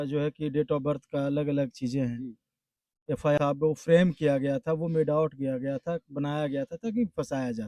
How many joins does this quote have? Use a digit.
1